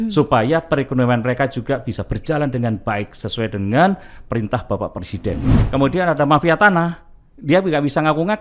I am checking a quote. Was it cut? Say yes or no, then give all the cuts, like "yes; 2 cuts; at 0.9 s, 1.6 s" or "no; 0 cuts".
yes; 1 cut; at 5.6 s